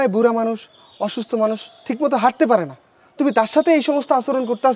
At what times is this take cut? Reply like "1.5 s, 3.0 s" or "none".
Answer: none